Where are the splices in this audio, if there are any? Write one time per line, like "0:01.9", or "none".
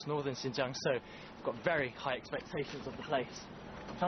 0:00.9